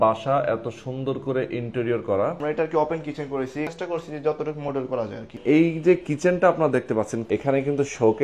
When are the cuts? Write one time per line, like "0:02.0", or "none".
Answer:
0:02.4
0:03.7
0:05.4
0:07.2